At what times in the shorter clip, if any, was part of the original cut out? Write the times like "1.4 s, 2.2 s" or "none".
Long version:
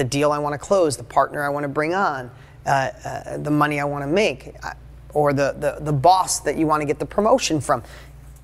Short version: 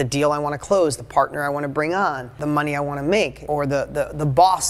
2.3 s, 3.4 s

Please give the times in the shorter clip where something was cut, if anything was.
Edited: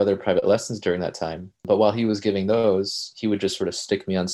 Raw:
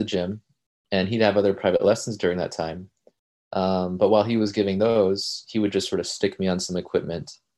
1.6 s

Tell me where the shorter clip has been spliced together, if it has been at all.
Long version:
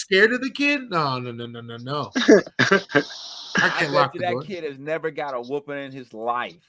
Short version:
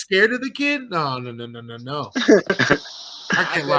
2.6 s

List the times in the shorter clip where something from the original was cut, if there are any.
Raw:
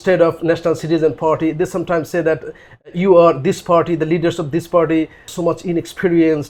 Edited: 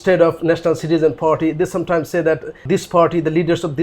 2.6 s

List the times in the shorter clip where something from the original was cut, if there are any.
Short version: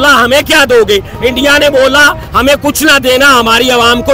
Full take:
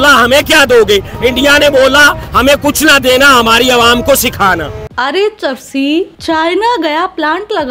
none

